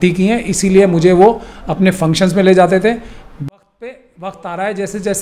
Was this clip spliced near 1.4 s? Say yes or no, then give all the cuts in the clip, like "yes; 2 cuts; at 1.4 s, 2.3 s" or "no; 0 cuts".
no; 1 cut; at 3.5 s